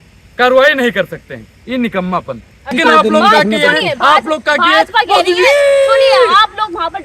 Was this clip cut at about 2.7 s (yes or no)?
yes